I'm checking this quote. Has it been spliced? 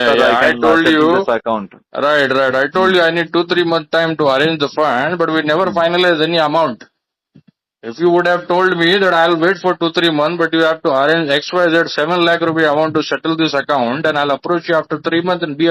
no; 0 cuts

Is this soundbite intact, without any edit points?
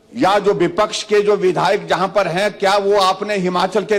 yes; 0 cuts

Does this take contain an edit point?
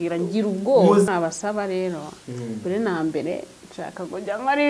yes; 1 cut; at 1.1 s

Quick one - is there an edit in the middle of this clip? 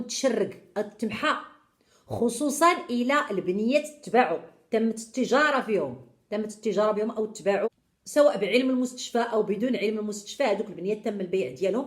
yes; 1 cut; at 7.7 s

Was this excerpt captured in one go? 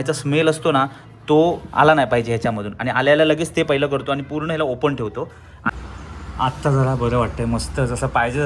no; 1 cut; at 5.7 s

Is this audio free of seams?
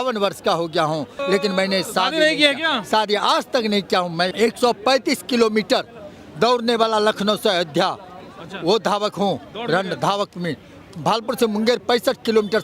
no; 2 cuts; at 1.2 s, 4.3 s

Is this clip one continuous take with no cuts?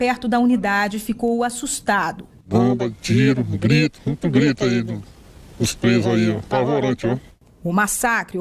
yes; 0 cuts

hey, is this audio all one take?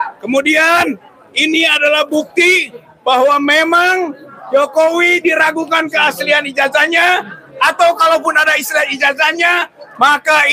yes; 0 cuts

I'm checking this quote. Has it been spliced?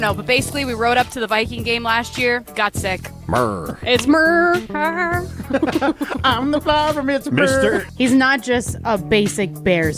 yes; 1 cut; at 7.9 s

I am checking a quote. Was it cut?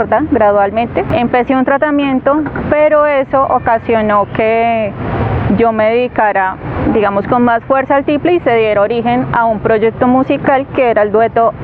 no; 0 cuts

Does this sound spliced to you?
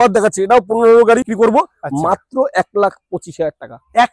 yes; 1 cut; at 1.3 s

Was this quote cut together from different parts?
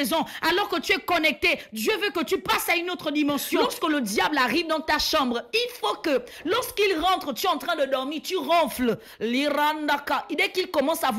yes; 1 cut; at 3.5 s

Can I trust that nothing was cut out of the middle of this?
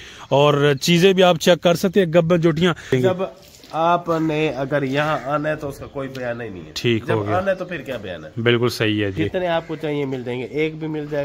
no; 2 cuts; at 2.9 s, 9.2 s

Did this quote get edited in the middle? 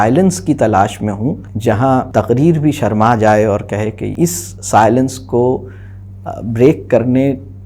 yes; 3 cuts; at 1.5 s, 2.1 s, 4.1 s

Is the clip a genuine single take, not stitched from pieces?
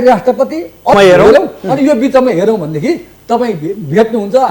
no; 1 cut; at 0.9 s

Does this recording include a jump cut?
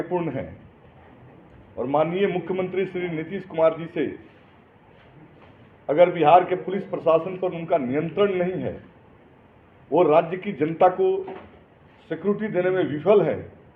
no; 0 cuts

